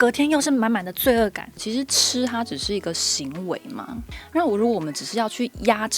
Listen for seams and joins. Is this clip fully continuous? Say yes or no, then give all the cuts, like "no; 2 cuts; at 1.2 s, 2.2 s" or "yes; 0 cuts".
no; 1 cut; at 1.5 s